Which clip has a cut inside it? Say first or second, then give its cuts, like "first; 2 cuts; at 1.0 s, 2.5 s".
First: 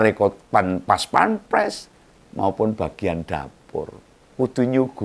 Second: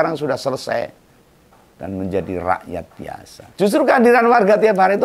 second; 1 cut; at 3.4 s